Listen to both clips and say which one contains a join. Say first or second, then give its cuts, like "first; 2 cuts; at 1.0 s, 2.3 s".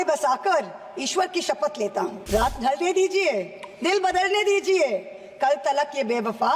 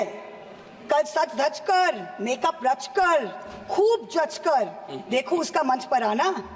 first; 1 cut; at 2.2 s